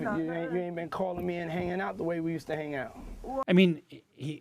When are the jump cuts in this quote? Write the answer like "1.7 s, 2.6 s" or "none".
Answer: 3.5 s